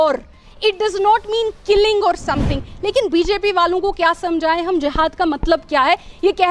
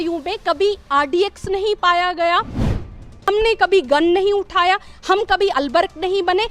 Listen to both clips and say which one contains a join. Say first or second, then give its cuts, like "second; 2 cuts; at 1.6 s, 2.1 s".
second; 1 cut; at 2.7 s